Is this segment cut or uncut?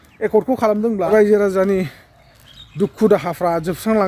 cut